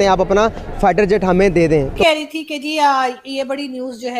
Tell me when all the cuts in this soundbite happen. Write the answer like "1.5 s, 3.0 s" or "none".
2.0 s